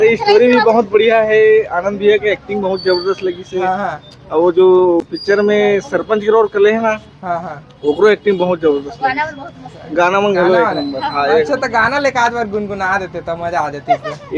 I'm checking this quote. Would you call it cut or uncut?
uncut